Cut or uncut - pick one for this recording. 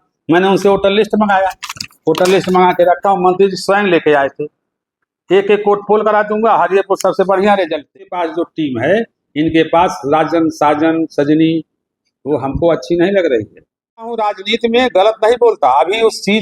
cut